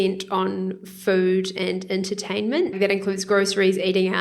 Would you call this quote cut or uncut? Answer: cut